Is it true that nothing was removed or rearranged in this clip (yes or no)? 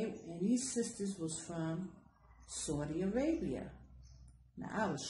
yes